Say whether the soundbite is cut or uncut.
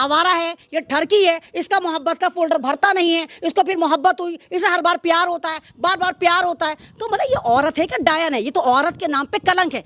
uncut